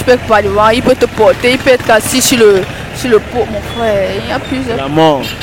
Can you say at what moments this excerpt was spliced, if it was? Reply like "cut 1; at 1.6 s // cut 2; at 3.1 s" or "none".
none